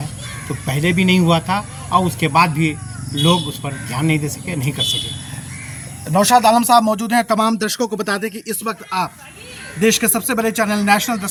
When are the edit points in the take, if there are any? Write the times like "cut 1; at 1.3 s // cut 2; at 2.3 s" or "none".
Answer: none